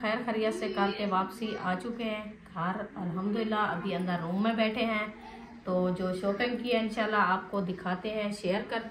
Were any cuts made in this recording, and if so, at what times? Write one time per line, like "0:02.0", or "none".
none